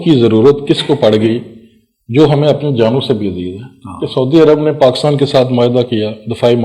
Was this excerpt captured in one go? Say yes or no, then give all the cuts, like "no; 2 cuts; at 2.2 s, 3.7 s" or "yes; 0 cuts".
yes; 0 cuts